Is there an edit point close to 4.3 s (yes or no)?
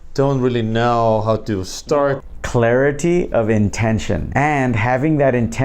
yes